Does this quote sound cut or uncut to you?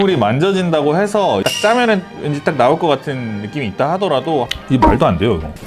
cut